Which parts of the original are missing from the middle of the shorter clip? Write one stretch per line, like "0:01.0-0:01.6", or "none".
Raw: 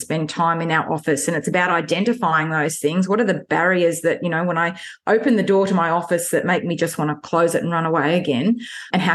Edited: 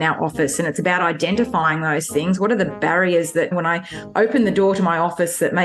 0:04.2-0:04.4